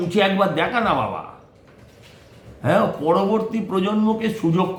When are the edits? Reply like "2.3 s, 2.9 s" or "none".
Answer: none